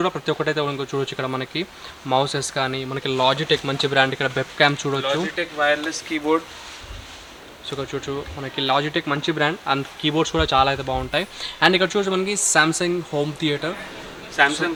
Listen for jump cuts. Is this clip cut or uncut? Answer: uncut